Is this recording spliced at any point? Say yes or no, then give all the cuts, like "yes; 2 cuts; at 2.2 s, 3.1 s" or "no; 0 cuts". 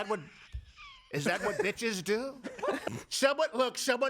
yes; 1 cut; at 2.8 s